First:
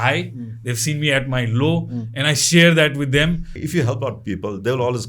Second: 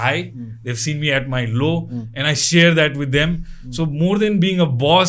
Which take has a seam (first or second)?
first